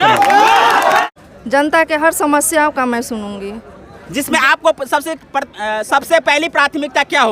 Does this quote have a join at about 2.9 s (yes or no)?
no